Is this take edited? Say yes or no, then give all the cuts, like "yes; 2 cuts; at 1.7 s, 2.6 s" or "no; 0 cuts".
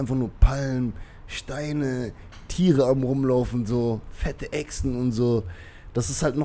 no; 0 cuts